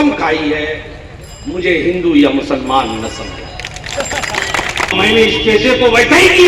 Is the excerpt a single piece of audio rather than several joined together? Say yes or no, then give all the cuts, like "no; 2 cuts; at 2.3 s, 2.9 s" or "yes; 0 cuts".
no; 1 cut; at 4.9 s